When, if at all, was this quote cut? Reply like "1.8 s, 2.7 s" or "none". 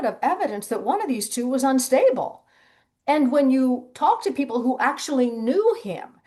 none